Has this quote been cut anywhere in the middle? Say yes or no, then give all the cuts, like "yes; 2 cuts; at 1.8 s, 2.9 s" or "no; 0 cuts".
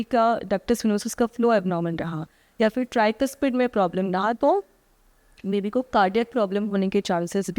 no; 0 cuts